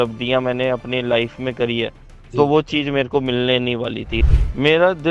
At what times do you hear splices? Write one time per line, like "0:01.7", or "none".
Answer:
0:04.2